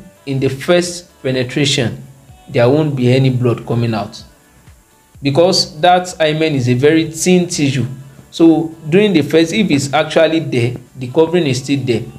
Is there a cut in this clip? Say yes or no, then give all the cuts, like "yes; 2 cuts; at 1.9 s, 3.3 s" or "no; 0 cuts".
no; 0 cuts